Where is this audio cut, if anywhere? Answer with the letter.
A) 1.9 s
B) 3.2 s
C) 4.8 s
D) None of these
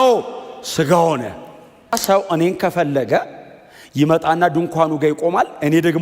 A